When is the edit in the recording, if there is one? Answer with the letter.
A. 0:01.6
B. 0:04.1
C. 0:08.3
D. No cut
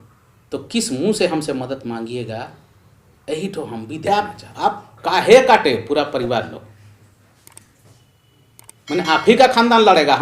B